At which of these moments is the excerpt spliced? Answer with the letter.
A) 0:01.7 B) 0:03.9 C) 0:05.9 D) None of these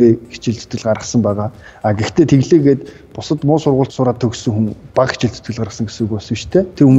B